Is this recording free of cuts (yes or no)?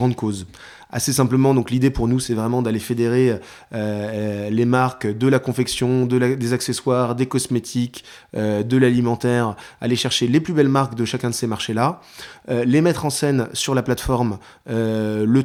yes